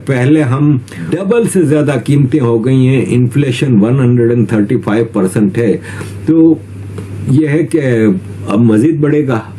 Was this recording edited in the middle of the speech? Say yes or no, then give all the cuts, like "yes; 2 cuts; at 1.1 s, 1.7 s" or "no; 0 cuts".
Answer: no; 0 cuts